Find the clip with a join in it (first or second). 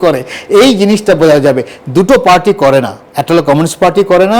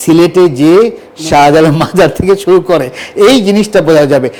first